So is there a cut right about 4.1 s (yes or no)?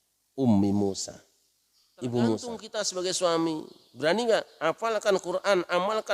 no